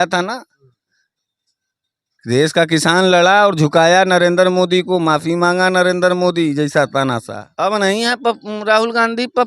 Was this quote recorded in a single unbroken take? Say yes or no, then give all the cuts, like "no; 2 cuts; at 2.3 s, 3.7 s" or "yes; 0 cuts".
no; 1 cut; at 7.4 s